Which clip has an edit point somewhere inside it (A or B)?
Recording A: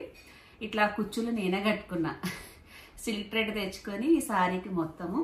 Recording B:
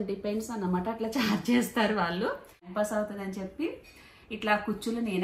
B